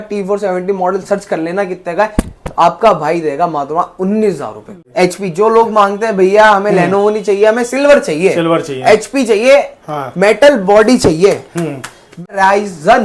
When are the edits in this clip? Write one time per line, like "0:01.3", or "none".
0:04.9
0:12.3